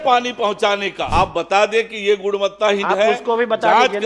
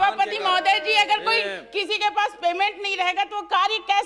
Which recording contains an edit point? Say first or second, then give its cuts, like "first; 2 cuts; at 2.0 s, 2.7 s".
first; 1 cut; at 1.0 s